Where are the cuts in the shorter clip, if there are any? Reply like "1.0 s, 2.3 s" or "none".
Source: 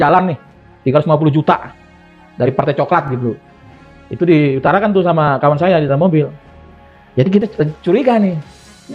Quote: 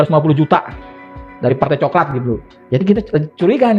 2.5 s

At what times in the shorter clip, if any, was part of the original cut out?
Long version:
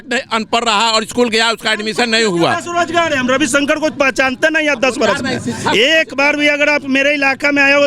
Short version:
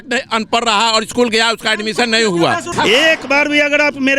2.7 s

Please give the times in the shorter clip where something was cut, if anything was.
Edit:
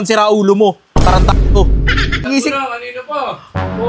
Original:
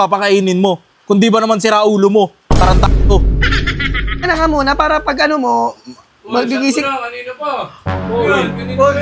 2.3 s

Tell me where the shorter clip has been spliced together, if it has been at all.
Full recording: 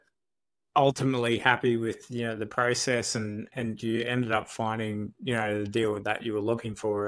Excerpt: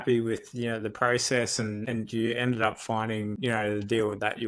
1.8 s, 3.3 s

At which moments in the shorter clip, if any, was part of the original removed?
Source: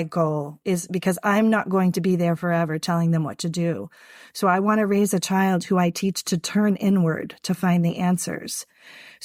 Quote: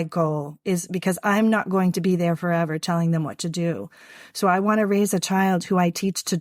none

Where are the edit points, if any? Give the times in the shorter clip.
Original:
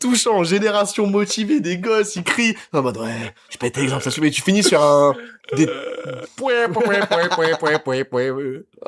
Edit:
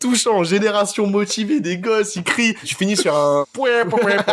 2.7 s, 3.5 s

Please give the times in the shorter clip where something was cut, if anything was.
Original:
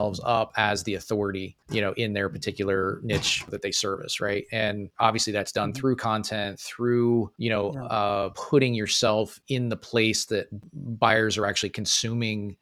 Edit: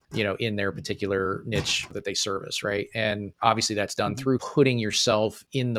4.4 s

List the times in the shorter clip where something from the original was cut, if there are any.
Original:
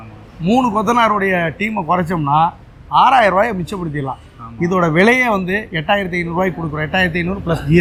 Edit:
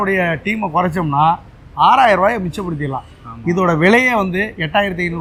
none

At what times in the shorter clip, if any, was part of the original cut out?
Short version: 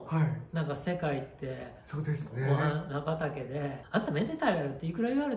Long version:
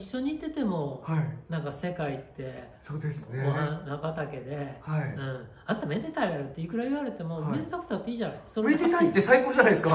3.8 s

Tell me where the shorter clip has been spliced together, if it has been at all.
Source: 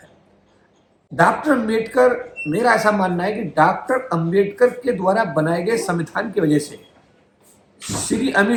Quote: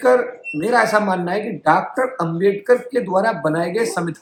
none

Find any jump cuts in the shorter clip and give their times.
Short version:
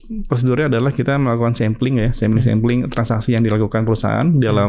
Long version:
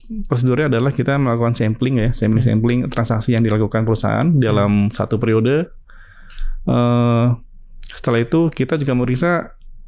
none

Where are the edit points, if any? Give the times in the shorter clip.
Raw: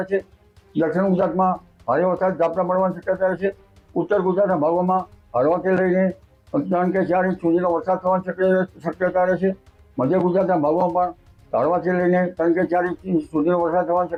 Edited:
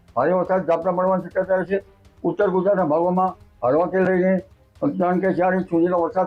none

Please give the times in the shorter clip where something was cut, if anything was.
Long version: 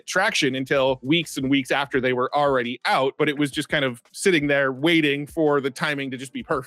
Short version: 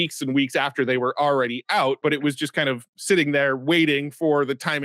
none

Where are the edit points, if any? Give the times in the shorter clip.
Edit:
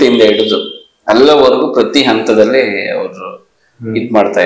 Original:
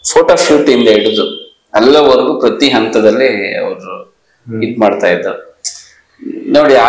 none

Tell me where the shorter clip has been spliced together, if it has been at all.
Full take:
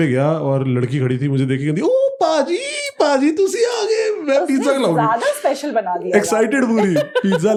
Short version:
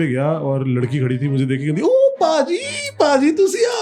none

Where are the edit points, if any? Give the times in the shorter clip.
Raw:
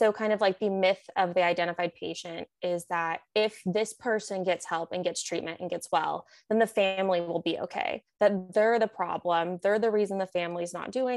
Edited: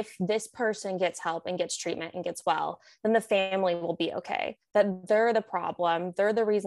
none

